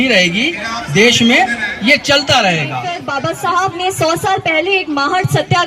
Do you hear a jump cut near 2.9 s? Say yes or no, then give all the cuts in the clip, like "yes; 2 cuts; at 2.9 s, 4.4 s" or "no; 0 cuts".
yes; 1 cut; at 2.9 s